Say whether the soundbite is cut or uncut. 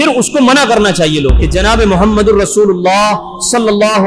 cut